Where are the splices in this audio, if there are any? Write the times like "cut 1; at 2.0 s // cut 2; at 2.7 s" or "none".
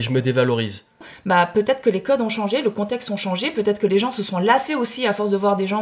cut 1; at 1.1 s